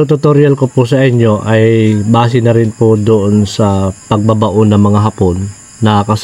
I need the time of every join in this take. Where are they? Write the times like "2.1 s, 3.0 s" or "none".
none